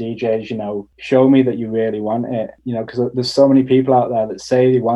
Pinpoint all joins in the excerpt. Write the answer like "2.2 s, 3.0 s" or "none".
0.9 s, 2.6 s